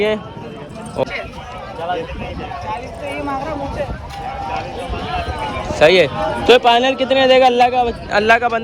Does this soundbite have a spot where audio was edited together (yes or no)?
yes